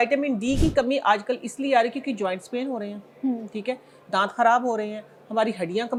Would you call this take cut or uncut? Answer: uncut